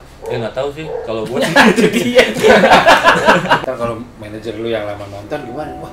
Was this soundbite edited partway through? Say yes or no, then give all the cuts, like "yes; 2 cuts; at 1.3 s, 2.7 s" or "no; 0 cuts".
yes; 1 cut; at 3.6 s